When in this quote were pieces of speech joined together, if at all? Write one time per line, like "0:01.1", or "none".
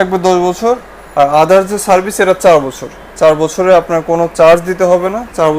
none